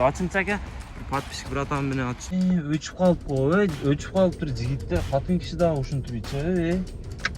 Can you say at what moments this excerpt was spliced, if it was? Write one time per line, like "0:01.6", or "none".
0:02.3